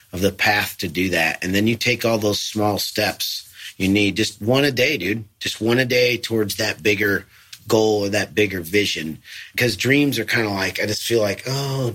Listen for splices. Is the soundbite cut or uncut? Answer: cut